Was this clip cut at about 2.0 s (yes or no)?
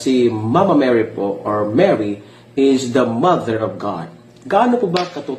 yes